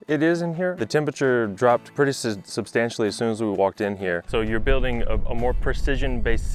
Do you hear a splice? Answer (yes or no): yes